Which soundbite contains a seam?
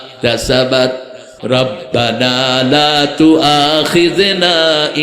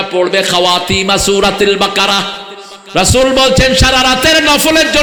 first; 1 cut; at 1.3 s

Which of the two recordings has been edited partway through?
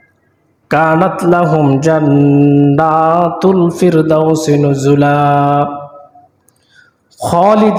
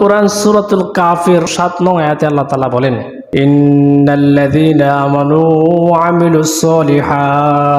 second; 2 cuts; at 1.5 s, 3.1 s

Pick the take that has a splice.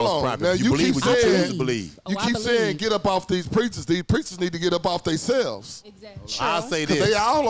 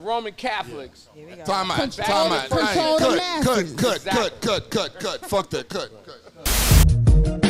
second; 1 cut; at 6.6 s

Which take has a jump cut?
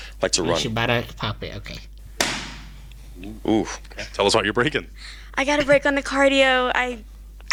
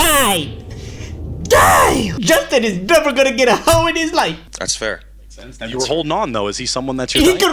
second; 1 cut; at 4.4 s

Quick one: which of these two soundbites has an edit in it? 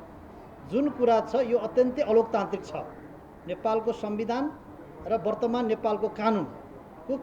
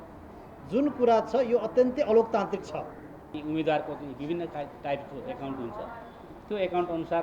second; 1 cut; at 3.4 s

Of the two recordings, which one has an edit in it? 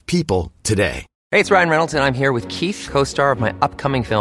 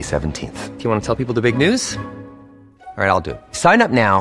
first; 1 cut; at 1.1 s

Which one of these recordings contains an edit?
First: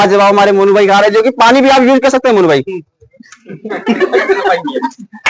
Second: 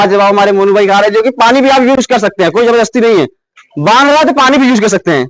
second; 1 cut; at 2.0 s

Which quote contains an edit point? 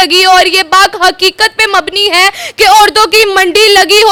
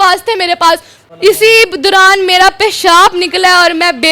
second; 1 cut; at 1.0 s

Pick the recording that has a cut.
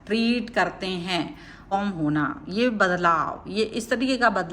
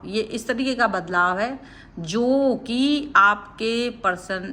first; 1 cut; at 1.7 s

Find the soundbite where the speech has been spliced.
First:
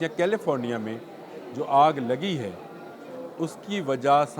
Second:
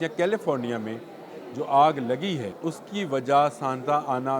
second; 1 cut; at 2.5 s

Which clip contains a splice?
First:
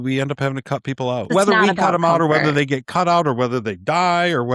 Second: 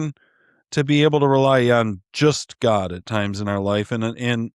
first; 1 cut; at 1.3 s

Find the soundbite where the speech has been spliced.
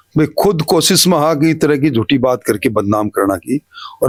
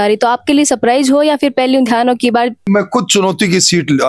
second; 1 cut; at 2.7 s

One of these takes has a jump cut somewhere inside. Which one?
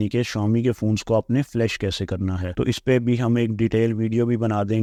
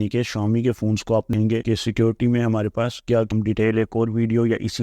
second; 2 cuts; at 1.3 s, 3.3 s

